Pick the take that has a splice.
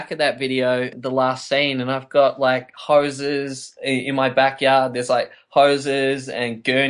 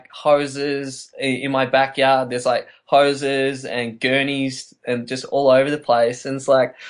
first; 1 cut; at 0.9 s

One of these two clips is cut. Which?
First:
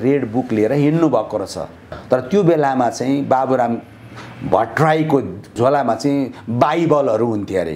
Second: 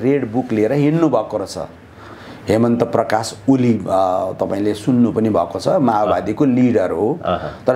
first; 2 cuts; at 1.9 s, 5.5 s

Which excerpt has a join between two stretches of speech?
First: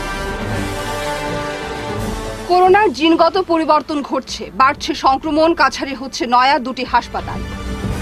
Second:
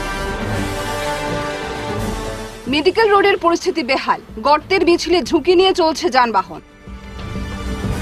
second; 1 cut; at 2.3 s

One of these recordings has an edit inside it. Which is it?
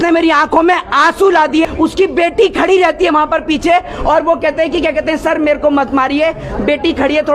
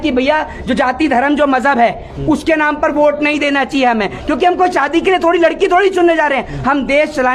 first; 1 cut; at 1.6 s

